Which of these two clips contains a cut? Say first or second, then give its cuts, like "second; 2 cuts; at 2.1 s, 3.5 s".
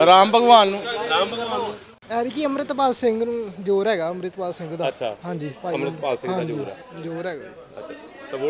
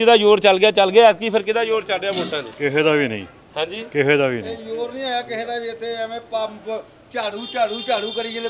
first; 1 cut; at 1.9 s